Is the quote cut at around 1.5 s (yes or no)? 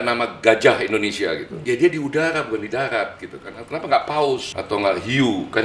yes